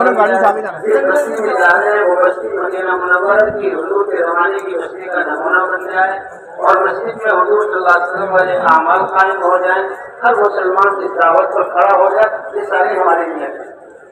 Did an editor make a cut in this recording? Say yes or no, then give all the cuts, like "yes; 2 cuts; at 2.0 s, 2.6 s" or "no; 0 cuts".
no; 0 cuts